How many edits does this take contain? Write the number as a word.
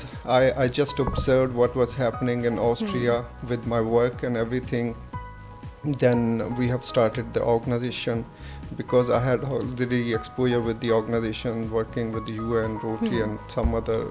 zero